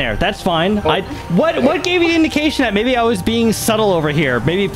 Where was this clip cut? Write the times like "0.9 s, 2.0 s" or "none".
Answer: 1.2 s